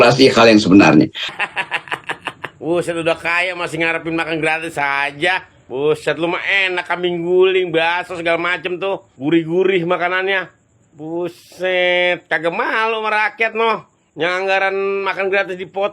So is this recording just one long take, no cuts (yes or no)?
no